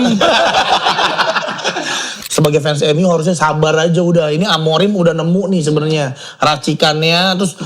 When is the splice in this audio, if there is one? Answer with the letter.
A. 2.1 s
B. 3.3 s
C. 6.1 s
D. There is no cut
A